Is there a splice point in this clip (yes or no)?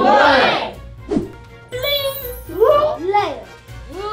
yes